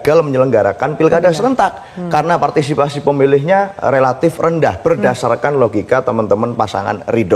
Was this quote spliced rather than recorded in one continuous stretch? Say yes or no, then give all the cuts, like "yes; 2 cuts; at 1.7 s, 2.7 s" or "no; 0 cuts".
no; 0 cuts